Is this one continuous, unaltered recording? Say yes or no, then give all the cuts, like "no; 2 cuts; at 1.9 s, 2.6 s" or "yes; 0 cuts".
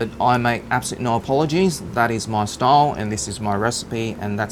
yes; 0 cuts